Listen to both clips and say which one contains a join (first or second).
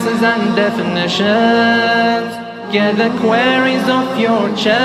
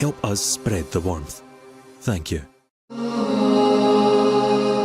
second